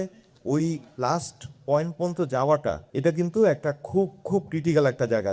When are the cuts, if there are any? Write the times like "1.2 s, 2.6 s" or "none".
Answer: 0.9 s, 2.8 s